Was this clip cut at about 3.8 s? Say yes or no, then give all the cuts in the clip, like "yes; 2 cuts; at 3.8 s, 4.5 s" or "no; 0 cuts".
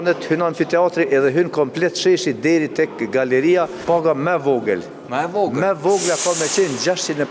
yes; 1 cut; at 3.8 s